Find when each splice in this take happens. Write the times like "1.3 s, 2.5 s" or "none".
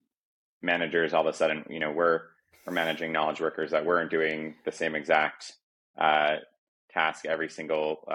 none